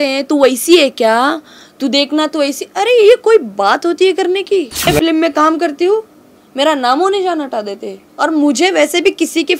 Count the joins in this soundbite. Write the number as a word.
one